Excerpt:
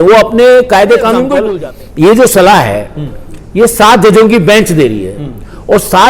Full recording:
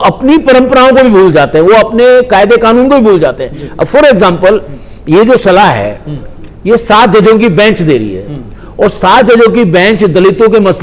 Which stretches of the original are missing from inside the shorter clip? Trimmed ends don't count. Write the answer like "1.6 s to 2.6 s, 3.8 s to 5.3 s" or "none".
3.0 s to 4.5 s